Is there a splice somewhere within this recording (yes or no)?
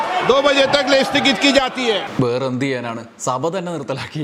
no